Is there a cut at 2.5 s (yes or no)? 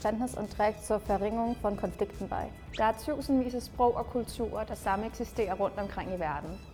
no